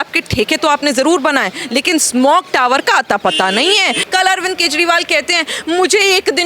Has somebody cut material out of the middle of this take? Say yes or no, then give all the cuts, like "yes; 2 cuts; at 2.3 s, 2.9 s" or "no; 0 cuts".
yes; 1 cut; at 4.0 s